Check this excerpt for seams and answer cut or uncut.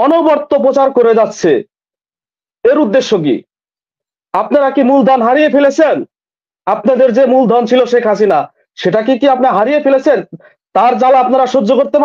uncut